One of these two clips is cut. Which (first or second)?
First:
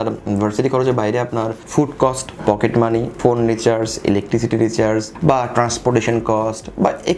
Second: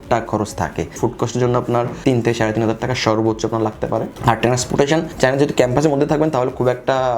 second